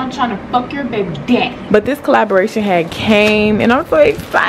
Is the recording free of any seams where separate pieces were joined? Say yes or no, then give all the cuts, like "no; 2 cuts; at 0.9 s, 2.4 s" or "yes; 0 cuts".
no; 1 cut; at 1.6 s